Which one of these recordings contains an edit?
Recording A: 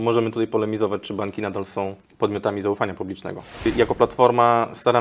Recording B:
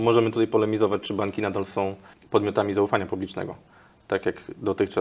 A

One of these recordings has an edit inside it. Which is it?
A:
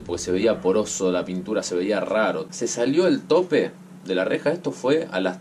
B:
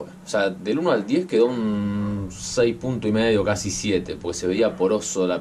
A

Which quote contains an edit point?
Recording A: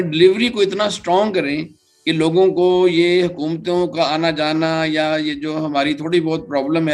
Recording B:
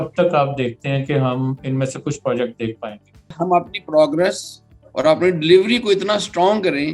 B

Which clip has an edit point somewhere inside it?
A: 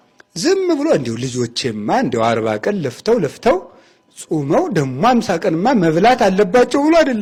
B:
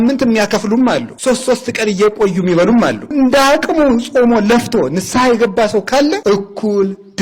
B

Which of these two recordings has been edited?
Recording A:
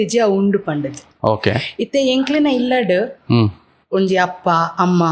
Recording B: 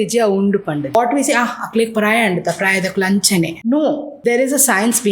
B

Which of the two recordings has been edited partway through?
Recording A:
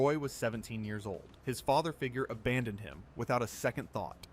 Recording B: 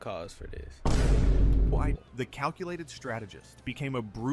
B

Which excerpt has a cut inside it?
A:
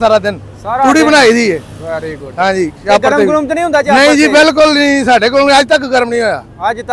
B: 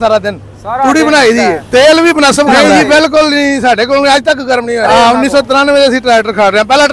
B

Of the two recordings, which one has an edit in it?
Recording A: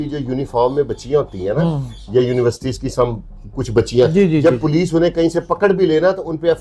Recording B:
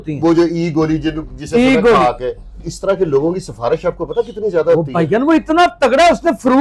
B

